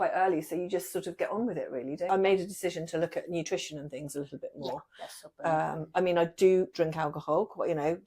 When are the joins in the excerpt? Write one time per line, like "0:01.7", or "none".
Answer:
0:02.1